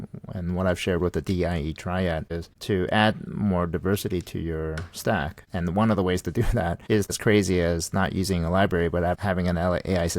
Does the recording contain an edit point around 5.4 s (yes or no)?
yes